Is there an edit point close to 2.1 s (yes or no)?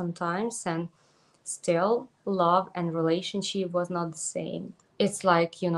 no